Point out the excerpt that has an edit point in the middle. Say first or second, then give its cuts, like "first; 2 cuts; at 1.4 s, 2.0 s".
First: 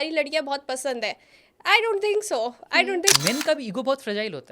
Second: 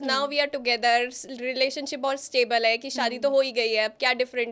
first; 1 cut; at 3.1 s